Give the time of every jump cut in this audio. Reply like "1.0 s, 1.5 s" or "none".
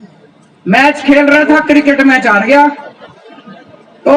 none